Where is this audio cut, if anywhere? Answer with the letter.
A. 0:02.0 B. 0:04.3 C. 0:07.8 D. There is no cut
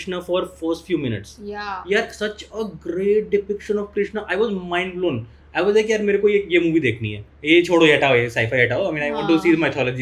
D